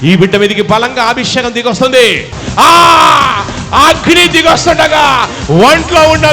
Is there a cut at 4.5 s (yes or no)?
no